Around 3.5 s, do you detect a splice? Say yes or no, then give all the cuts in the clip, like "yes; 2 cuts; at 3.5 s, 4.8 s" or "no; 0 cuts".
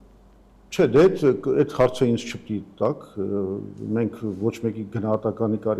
no; 0 cuts